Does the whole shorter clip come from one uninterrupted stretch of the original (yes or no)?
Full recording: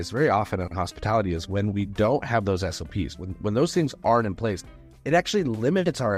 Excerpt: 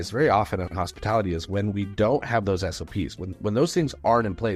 yes